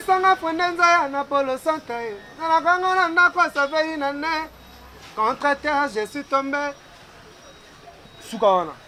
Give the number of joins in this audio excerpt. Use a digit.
0